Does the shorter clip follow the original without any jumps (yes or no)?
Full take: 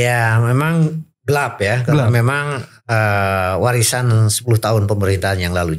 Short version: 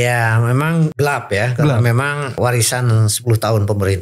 no